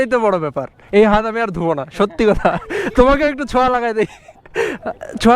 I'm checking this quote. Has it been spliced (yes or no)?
no